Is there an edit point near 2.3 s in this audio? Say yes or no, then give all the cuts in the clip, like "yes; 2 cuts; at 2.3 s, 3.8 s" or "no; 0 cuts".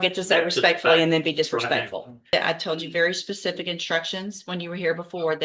yes; 1 cut; at 2.3 s